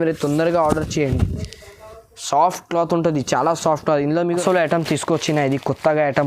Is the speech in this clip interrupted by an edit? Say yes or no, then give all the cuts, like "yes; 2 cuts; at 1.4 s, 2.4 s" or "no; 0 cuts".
yes; 1 cut; at 4.4 s